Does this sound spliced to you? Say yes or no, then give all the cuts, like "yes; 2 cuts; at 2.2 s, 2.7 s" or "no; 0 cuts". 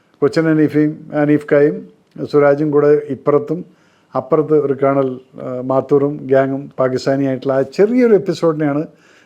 no; 0 cuts